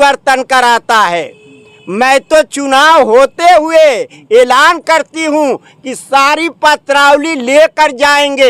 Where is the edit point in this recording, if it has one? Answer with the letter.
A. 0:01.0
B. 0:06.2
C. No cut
C